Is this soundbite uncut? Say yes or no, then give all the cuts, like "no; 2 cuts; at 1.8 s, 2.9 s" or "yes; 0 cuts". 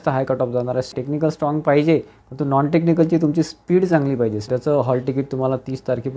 no; 2 cuts; at 1.0 s, 4.5 s